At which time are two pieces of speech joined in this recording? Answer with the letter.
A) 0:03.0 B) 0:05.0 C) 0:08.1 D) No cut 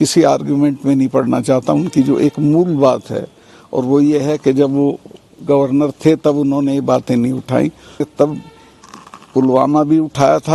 C